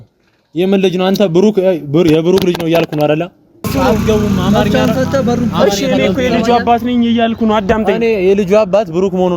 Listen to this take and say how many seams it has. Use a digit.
1